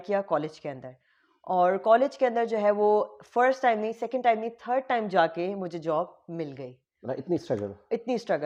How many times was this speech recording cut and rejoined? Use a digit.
0